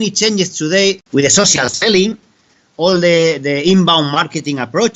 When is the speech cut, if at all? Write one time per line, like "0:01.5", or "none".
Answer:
0:01.0